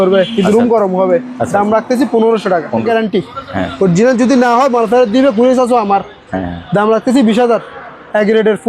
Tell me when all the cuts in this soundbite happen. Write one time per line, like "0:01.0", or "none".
0:02.9